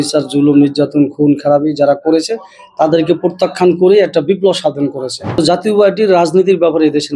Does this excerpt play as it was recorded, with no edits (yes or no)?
no